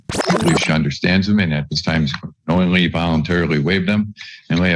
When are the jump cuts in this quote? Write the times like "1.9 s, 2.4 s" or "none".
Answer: none